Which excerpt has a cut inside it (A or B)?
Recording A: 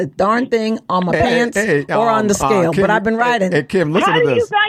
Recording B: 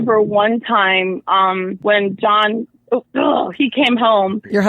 B